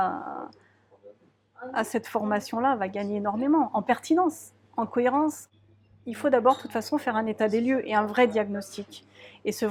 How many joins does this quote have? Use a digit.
1